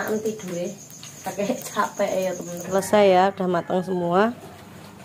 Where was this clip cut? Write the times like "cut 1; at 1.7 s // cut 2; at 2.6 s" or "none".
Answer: cut 1; at 2.6 s

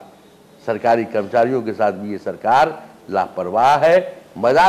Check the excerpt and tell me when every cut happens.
none

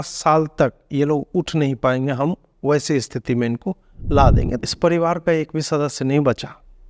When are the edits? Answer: cut 1; at 4.6 s

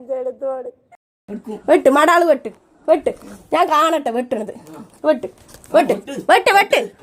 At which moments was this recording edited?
cut 1; at 0.9 s

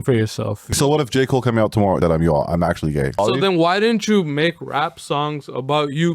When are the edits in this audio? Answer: cut 1; at 0.7 s // cut 2; at 2.0 s // cut 3; at 3.2 s

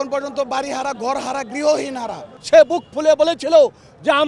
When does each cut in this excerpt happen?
cut 1; at 2.2 s

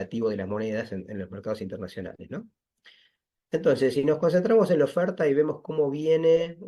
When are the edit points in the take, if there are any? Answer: none

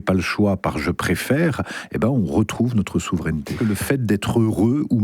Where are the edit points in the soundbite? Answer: cut 1; at 3.5 s

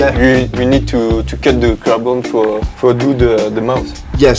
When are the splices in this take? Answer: cut 1; at 2.7 s

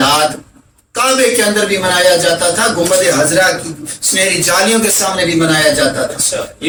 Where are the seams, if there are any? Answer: none

